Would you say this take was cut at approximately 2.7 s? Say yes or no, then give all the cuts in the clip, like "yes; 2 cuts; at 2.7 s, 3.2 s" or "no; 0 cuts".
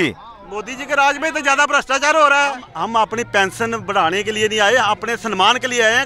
yes; 1 cut; at 2.7 s